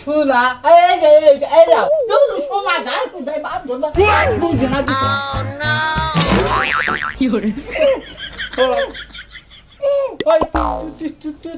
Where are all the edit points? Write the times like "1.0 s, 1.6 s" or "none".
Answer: none